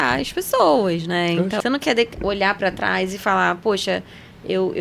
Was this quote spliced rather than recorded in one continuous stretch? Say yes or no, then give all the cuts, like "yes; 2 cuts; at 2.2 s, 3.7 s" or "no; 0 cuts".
yes; 1 cut; at 1.6 s